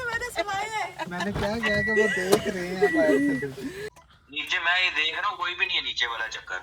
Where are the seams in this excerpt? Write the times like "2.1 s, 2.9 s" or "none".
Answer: 3.8 s